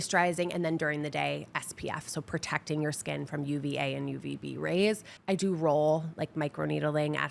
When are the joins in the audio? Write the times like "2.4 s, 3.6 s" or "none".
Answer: 5.1 s